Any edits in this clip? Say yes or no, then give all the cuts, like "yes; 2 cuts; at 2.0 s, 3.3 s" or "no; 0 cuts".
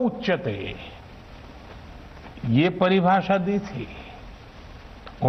no; 0 cuts